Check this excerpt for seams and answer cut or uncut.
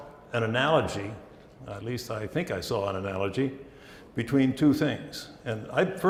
uncut